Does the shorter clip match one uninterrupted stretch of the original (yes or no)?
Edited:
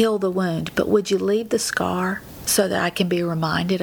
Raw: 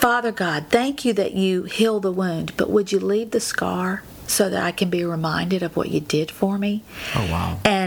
yes